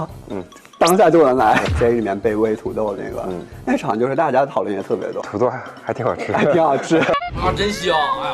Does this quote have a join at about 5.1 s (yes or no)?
yes